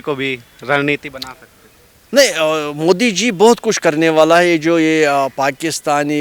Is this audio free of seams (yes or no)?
yes